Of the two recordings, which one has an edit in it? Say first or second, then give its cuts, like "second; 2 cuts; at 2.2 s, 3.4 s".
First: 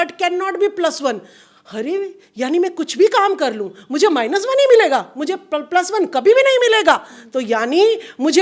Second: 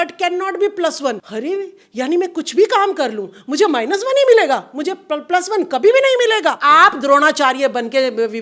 second; 2 cuts; at 1.2 s, 6.6 s